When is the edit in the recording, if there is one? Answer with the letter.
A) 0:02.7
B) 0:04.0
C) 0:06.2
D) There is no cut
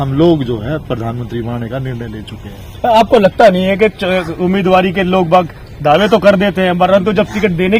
D